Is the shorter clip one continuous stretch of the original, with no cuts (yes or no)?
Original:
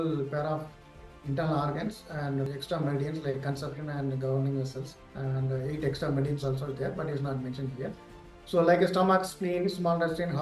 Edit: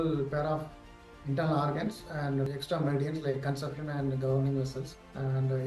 yes